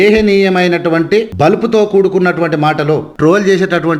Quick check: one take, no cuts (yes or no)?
no